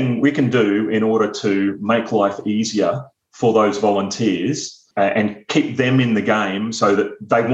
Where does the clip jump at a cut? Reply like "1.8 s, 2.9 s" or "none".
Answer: 4.8 s